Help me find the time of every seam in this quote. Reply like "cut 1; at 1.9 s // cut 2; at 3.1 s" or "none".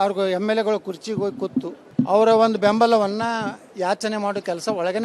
cut 1; at 1.8 s